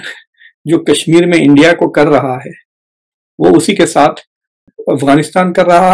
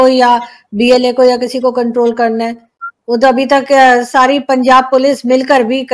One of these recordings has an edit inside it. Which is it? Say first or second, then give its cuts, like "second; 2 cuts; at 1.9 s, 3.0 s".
first; 1 cut; at 4.7 s